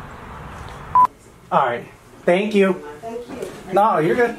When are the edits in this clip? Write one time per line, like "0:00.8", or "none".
0:01.0

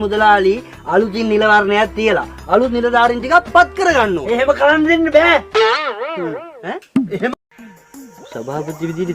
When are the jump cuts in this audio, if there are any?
0:07.4

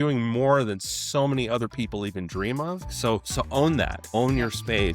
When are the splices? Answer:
0:02.9
0:04.0

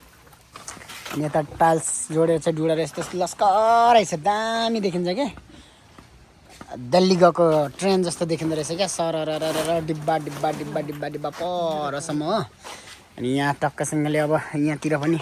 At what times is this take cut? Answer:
none

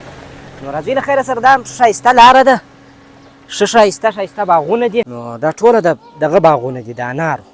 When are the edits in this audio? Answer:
0:05.2

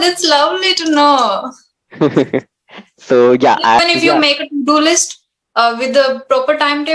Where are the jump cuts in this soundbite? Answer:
0:03.8

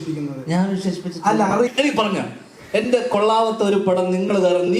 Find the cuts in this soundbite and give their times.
0:01.7

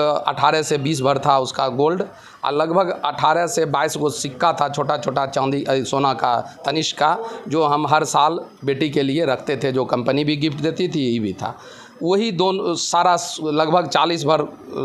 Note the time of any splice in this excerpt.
none

